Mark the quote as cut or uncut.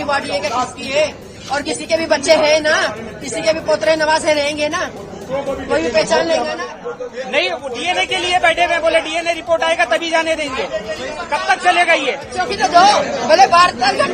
cut